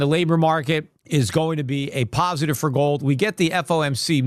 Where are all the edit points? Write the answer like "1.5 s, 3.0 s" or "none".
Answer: none